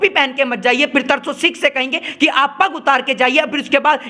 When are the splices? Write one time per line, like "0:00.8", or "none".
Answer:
none